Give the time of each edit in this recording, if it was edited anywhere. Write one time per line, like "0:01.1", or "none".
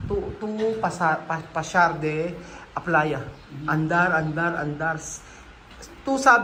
none